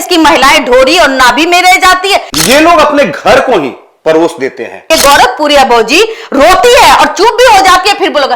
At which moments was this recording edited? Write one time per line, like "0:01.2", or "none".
0:02.3
0:04.8